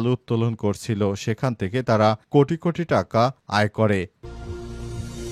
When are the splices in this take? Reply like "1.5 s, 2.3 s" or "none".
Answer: 4.2 s

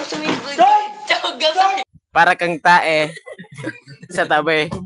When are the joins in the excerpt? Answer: 1.9 s

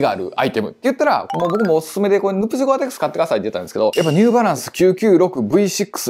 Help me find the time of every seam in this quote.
1.3 s, 3.9 s

